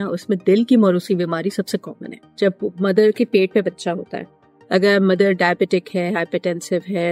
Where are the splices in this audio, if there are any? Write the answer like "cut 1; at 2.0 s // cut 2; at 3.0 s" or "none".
cut 1; at 2.2 s